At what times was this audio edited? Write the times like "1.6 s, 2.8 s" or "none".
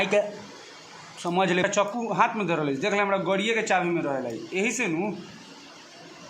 1.6 s